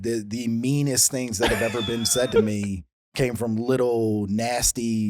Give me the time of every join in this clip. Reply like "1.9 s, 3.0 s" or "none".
none